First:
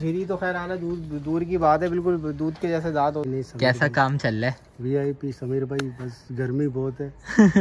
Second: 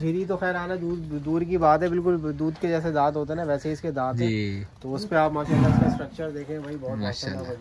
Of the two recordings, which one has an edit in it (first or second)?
first